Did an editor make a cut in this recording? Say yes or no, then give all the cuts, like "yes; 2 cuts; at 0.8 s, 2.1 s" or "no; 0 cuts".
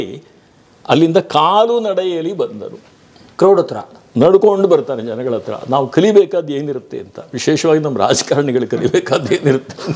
no; 0 cuts